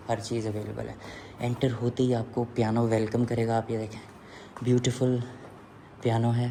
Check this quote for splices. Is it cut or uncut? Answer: uncut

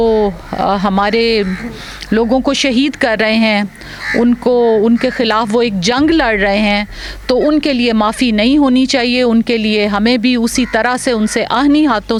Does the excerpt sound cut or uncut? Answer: uncut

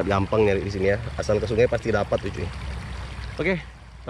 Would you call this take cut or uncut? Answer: uncut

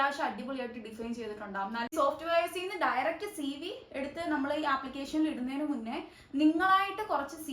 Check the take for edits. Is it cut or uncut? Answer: cut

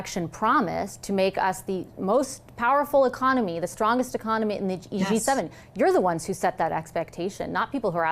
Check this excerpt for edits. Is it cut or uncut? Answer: uncut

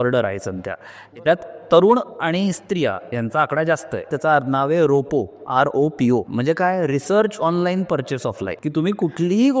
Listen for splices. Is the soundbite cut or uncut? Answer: cut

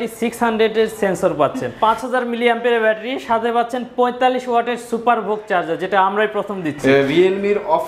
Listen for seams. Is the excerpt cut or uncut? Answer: cut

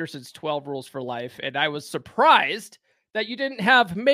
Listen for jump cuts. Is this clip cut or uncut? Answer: uncut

